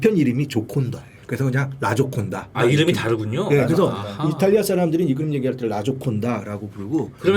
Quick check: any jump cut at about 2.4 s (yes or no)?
yes